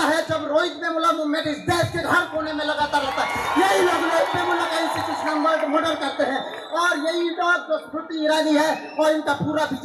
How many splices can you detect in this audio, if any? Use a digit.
0